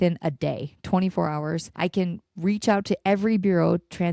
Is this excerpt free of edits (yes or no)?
no